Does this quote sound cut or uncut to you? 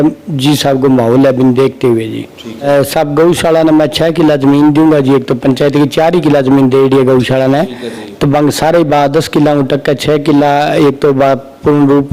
cut